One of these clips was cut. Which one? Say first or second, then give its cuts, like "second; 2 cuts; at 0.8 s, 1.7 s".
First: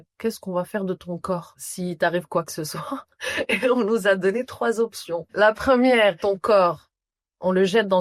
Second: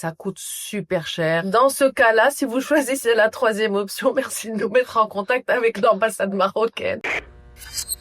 second; 1 cut; at 7.0 s